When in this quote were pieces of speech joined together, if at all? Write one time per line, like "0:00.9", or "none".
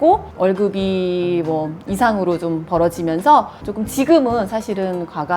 0:03.6

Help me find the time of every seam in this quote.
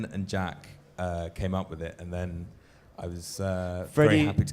0:02.2

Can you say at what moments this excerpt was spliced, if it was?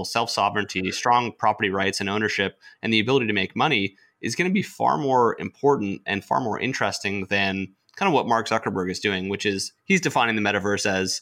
none

